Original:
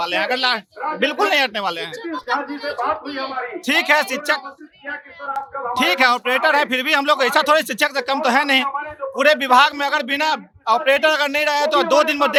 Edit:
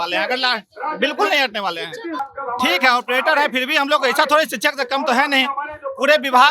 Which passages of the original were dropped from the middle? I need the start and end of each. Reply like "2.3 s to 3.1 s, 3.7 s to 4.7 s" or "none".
2.3 s to 5.4 s

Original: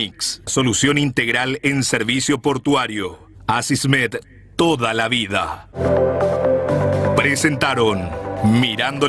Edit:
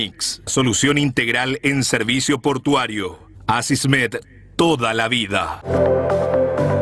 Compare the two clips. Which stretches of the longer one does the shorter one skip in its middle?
5.6 s to 5.7 s

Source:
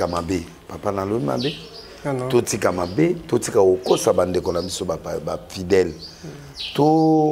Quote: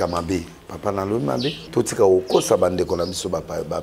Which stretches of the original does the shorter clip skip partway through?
1.7 s to 3.2 s

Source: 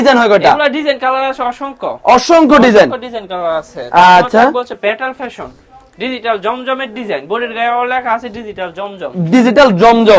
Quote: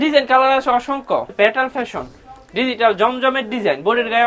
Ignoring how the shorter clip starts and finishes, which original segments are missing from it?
1.9 s to 4.7 s

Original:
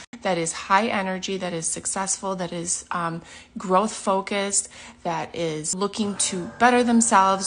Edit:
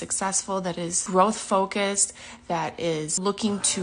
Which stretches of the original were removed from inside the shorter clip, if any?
2.7 s to 3.6 s

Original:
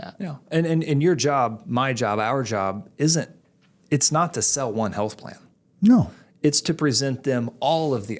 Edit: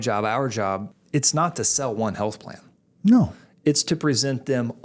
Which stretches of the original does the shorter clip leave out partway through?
2.9 s to 3.7 s

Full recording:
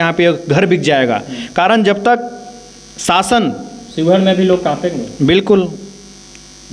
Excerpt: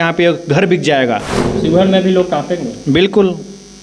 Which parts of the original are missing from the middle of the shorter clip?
1.4 s to 3.7 s

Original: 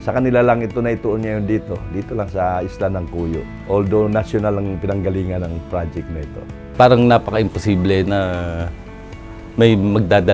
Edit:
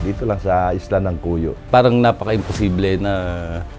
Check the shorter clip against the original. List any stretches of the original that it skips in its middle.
3.5 s to 6.6 s

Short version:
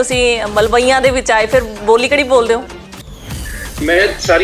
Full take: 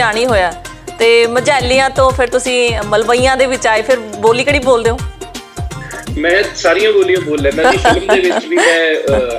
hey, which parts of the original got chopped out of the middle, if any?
none

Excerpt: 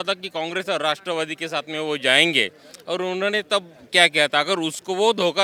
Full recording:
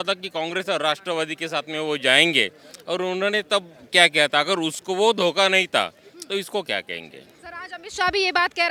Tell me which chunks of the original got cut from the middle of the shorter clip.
none

